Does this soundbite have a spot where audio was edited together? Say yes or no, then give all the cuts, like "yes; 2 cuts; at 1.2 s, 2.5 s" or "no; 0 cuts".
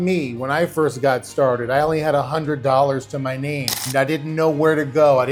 no; 0 cuts